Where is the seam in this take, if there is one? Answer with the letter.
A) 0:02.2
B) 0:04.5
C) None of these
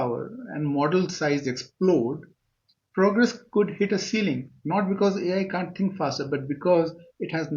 C